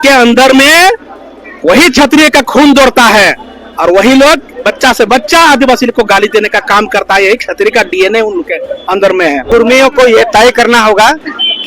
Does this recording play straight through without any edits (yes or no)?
no